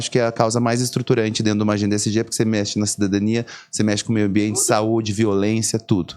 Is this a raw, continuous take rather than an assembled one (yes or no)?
yes